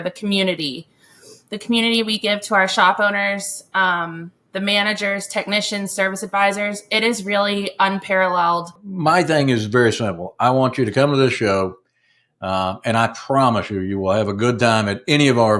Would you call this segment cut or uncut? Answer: cut